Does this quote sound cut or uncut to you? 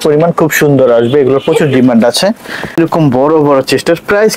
cut